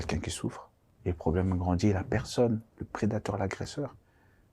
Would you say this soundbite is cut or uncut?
cut